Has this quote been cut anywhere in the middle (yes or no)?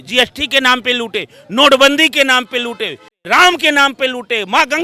yes